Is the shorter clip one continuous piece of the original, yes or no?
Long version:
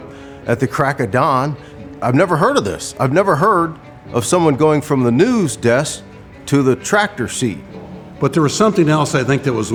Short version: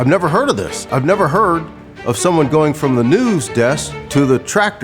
no